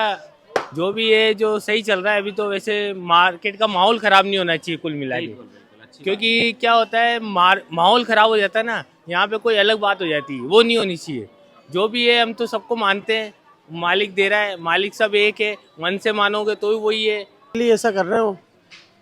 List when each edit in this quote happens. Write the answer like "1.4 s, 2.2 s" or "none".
17.6 s